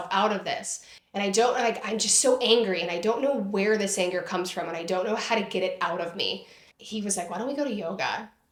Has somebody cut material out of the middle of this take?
no; 0 cuts

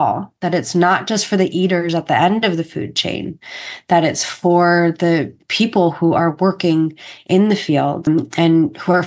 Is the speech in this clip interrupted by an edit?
yes; 2 cuts; at 5.4 s, 8.0 s

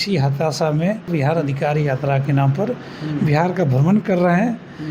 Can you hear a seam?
yes; 1 cut; at 1.1 s

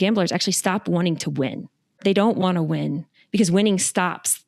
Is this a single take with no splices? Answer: no; 1 cut; at 2.0 s

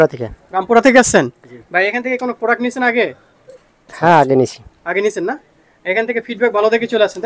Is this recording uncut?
yes; 0 cuts

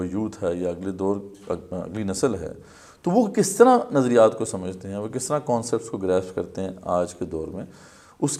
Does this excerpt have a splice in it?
no; 0 cuts

